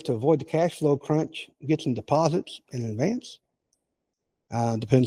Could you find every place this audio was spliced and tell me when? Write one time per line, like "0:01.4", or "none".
none

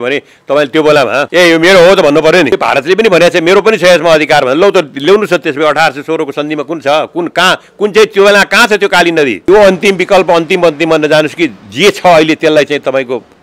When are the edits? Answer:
0:01.3
0:02.5
0:09.4

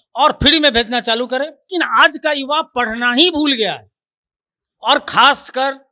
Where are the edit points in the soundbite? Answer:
0:01.7

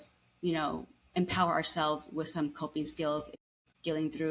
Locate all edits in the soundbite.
0:03.4

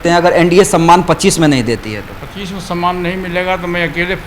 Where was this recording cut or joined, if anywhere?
none

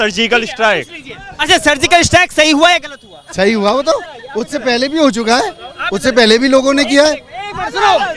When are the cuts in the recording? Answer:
none

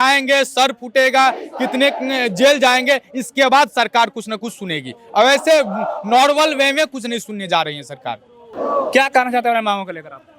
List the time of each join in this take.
none

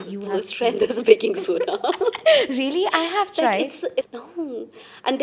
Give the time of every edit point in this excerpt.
0:04.1

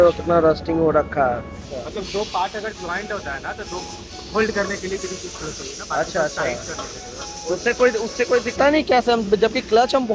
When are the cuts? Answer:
0:01.7
0:08.6

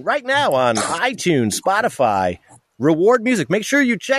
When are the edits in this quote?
none

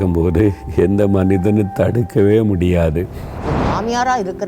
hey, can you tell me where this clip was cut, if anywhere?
0:03.4

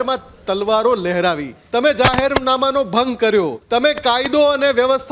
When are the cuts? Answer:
0:01.5
0:03.6

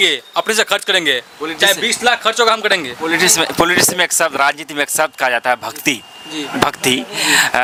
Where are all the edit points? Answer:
none

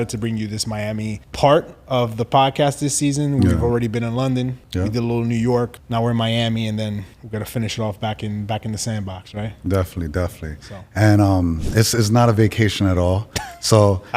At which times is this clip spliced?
0:01.2
0:04.6
0:05.8
0:07.1

